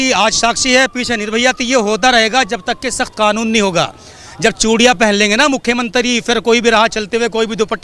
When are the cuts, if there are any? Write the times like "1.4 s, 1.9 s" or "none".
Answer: none